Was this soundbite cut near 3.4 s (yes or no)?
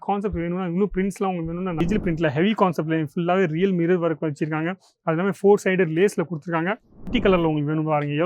no